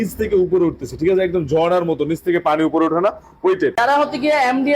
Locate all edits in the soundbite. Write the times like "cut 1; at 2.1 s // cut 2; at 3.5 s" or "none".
cut 1; at 3.7 s